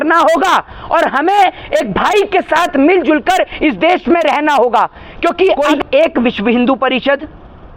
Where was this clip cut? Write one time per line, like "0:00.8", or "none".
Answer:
0:05.6